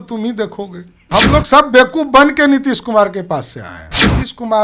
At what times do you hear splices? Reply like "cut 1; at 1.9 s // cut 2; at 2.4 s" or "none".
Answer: cut 1; at 1.1 s